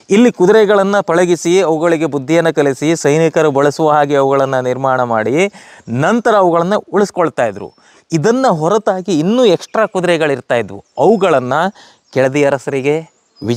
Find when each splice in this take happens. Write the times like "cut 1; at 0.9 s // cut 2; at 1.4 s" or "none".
none